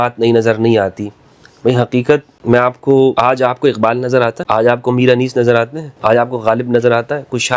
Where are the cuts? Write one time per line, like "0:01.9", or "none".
0:02.3
0:03.1
0:04.4
0:05.8